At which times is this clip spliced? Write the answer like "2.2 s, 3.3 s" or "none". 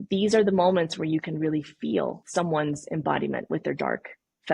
2.2 s